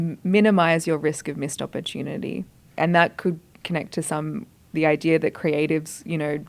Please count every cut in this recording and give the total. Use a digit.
2